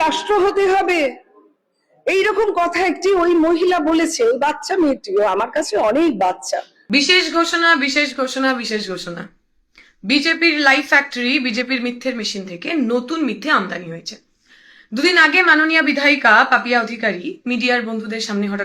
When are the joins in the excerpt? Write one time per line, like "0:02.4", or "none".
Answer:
0:06.7